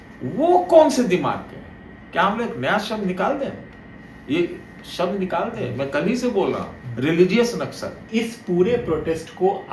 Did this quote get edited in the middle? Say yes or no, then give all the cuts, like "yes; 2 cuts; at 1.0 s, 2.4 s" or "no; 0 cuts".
yes; 1 cut; at 8.1 s